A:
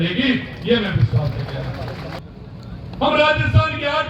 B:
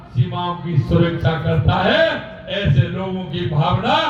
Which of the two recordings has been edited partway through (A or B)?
A